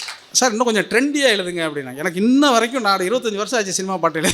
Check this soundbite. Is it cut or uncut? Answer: uncut